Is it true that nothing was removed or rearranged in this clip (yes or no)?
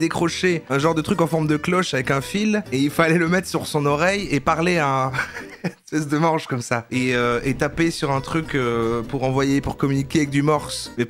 yes